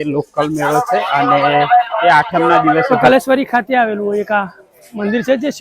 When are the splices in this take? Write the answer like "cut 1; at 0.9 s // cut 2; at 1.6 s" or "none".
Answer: cut 1; at 2.9 s

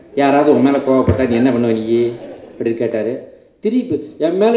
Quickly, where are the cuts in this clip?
none

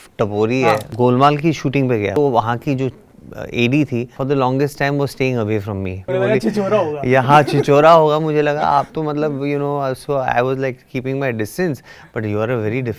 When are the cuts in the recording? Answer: cut 1; at 0.9 s // cut 2; at 2.1 s // cut 3; at 4.1 s // cut 4; at 6.1 s

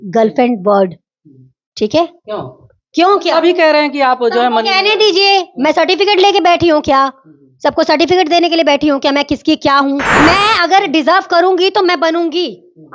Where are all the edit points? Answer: cut 1; at 10.1 s

